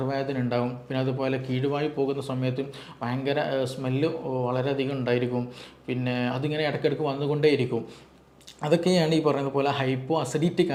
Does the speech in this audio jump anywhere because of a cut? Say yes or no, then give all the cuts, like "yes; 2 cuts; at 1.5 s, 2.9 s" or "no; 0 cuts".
no; 0 cuts